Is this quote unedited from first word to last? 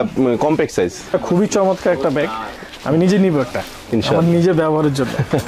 no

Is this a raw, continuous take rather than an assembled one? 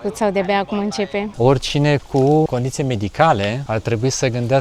no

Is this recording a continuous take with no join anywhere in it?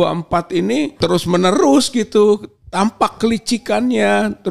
no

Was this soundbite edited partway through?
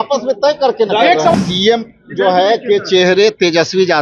yes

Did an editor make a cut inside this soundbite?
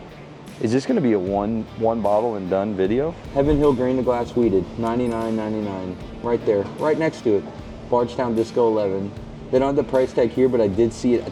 no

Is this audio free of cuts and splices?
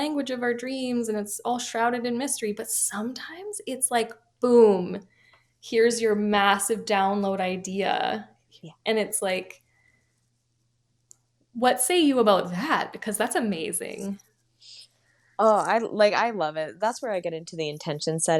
yes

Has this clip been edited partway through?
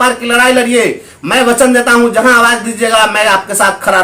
no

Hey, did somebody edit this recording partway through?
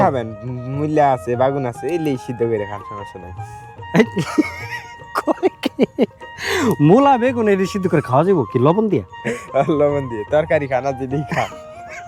no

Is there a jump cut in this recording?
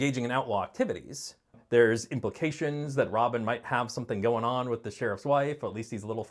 yes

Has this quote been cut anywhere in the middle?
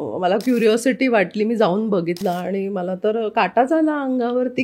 yes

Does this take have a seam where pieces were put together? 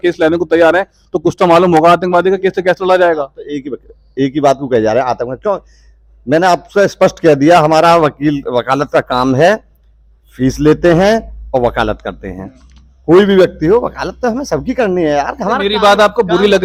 no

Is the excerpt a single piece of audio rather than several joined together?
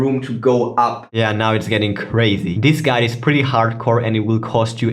no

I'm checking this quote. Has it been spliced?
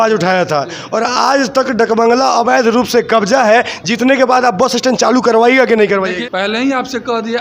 yes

